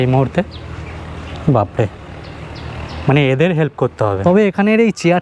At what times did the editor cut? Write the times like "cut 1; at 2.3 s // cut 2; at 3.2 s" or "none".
cut 1; at 4.2 s